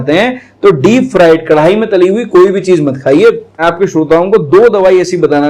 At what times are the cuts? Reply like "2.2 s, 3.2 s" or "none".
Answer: 3.6 s